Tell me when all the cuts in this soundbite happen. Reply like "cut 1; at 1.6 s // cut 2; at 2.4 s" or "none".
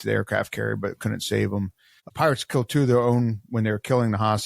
cut 1; at 2.1 s